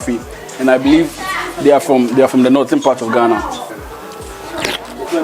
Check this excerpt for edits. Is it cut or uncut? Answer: cut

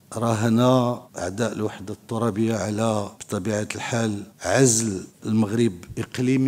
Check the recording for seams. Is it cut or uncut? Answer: cut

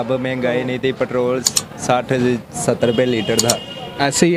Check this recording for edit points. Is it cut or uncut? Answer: uncut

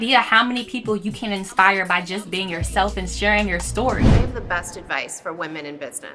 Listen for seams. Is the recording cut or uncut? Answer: cut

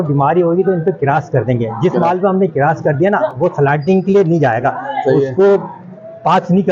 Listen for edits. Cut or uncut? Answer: uncut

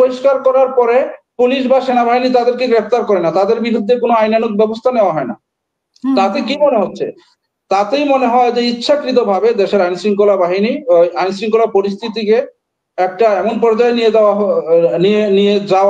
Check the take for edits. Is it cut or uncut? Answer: uncut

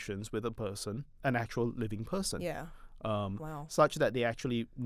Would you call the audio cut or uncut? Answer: cut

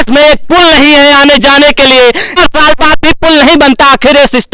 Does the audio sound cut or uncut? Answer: cut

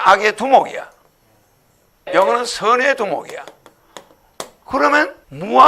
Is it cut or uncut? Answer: cut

